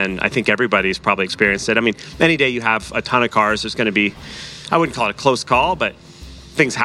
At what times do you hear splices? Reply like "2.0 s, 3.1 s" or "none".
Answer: none